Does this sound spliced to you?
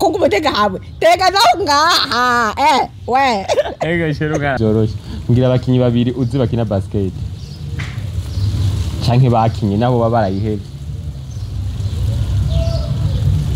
yes; 1 cut; at 4.6 s

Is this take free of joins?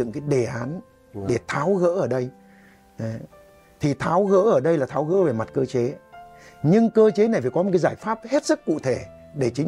yes; 0 cuts

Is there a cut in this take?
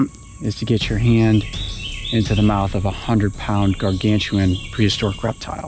no; 0 cuts

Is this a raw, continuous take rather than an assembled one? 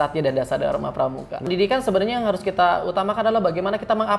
no; 1 cut; at 1.5 s

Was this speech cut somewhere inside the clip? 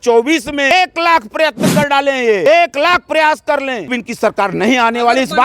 yes; 3 cuts; at 0.7 s, 2.5 s, 3.9 s

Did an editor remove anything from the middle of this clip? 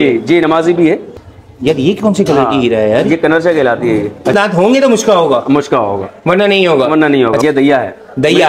yes; 3 cuts; at 1.1 s, 4.3 s, 7.4 s

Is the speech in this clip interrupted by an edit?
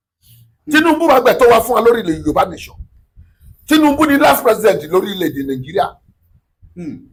no; 0 cuts

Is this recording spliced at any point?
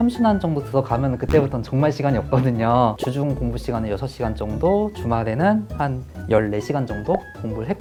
no; 0 cuts

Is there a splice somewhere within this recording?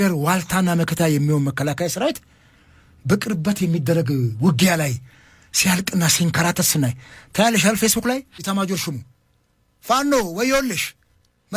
yes; 1 cut; at 8.4 s

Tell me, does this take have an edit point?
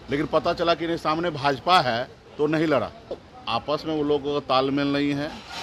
yes; 1 cut; at 3.3 s

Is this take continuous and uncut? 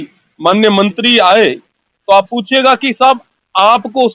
yes; 0 cuts

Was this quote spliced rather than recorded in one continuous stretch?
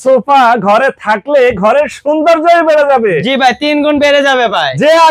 no; 0 cuts

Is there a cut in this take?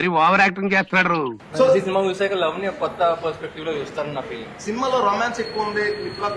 yes; 1 cut; at 1.4 s

